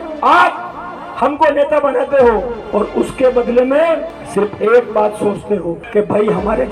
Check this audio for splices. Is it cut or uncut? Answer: cut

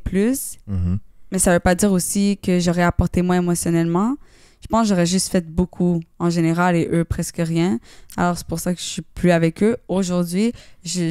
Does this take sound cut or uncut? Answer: cut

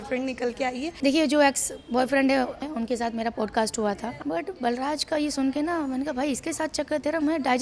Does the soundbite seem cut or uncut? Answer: cut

